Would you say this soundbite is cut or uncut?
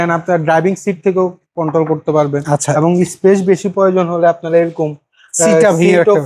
uncut